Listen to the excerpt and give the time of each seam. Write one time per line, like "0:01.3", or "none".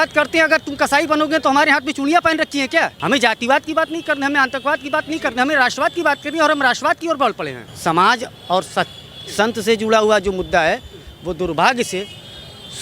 0:03.0
0:07.6